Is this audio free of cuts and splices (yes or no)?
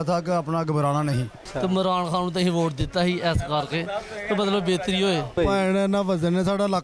no